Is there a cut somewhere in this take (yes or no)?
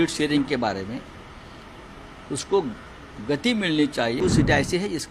yes